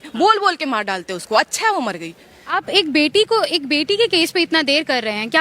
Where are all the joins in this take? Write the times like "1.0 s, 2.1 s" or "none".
2.5 s